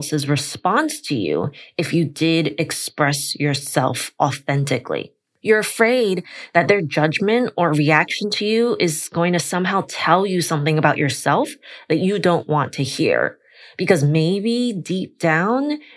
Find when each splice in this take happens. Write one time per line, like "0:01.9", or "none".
none